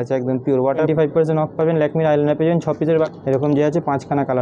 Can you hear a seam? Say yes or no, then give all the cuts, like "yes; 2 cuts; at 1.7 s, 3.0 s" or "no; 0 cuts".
yes; 2 cuts; at 0.9 s, 3.1 s